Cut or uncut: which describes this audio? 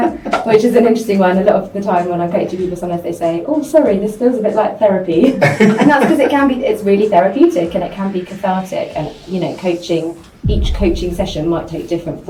uncut